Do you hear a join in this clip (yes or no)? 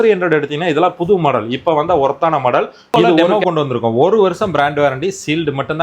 yes